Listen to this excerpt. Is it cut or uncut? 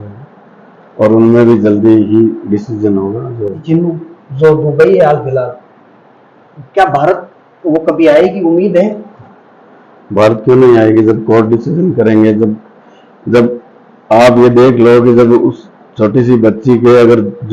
cut